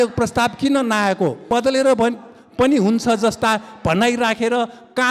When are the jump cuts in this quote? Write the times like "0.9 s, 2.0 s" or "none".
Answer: 1.4 s